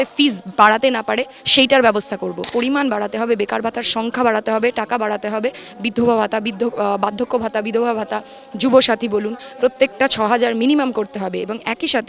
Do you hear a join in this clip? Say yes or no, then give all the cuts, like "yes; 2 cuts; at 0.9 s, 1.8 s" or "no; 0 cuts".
yes; 1 cut; at 2.5 s